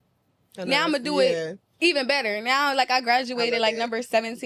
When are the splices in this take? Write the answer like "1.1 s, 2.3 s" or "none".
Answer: none